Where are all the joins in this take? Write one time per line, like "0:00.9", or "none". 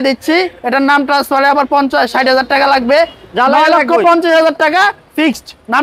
none